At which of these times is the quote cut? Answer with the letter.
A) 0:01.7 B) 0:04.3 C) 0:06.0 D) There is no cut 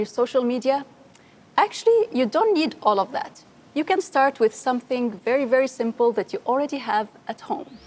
D